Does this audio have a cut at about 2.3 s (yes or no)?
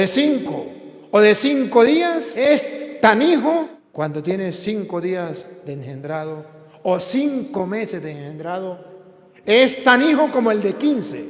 yes